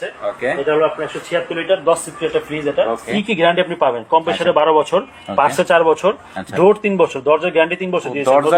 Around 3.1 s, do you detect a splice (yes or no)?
yes